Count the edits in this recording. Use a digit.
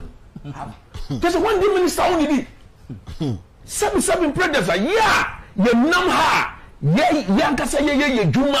0